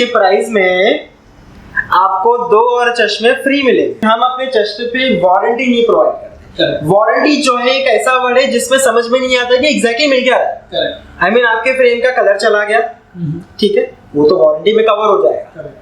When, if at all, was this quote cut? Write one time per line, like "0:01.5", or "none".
none